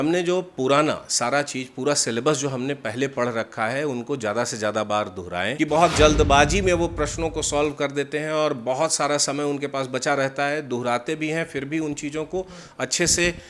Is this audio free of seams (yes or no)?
no